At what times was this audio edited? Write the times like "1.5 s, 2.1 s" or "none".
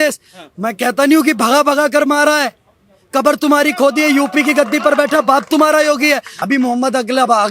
6.3 s